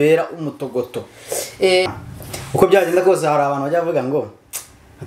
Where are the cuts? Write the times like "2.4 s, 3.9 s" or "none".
1.8 s